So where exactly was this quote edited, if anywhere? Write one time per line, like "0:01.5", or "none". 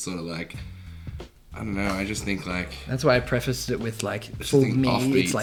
none